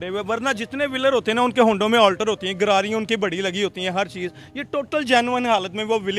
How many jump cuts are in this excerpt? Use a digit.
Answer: 0